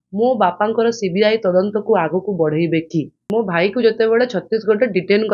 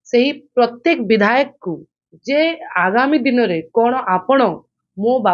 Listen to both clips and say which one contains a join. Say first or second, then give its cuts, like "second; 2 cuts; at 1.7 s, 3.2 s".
first; 1 cut; at 3.2 s